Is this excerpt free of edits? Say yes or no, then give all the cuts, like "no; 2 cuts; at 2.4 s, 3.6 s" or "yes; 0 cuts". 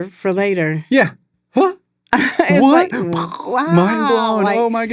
yes; 0 cuts